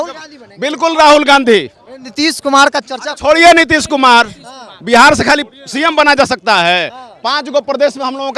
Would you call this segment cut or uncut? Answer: uncut